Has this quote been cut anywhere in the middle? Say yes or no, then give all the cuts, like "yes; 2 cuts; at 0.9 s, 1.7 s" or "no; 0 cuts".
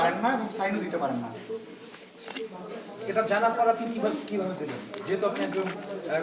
no; 0 cuts